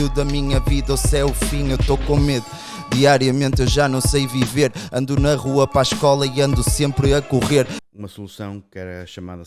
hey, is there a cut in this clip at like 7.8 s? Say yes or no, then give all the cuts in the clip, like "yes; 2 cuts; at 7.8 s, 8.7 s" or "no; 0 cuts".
yes; 1 cut; at 7.8 s